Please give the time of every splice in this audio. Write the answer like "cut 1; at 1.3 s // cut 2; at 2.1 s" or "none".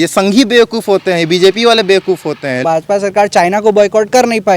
cut 1; at 2.6 s